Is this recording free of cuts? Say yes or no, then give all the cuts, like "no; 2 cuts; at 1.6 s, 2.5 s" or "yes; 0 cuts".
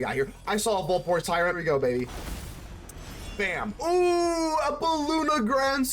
no; 2 cuts; at 1.6 s, 3.8 s